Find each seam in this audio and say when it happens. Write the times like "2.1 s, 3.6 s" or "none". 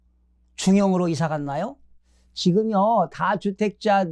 none